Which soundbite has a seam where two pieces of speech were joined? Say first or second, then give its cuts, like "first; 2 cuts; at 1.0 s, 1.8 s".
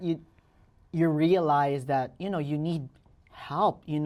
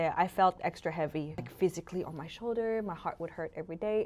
second; 1 cut; at 1.4 s